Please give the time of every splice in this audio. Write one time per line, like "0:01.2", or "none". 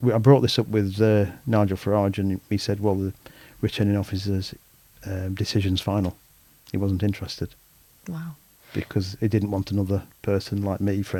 none